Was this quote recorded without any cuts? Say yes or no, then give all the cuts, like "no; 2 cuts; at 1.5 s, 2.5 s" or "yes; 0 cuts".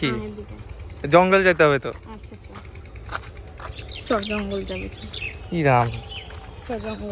yes; 0 cuts